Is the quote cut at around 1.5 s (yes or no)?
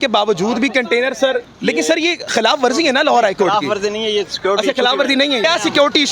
yes